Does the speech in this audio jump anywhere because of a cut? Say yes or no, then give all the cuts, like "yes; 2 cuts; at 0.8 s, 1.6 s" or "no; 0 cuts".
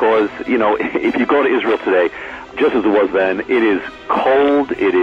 yes; 1 cut; at 2.5 s